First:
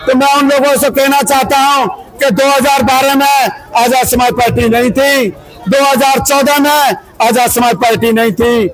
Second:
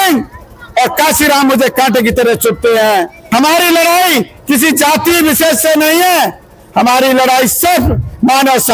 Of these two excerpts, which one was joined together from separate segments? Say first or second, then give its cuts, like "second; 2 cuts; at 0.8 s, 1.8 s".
second; 1 cut; at 3.2 s